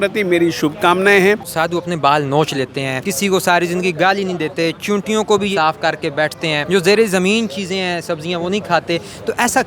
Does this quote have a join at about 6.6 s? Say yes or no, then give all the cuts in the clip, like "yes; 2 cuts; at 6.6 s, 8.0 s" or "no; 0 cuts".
yes; 4 cuts; at 1.5 s, 3.0 s, 5.5 s, 6.6 s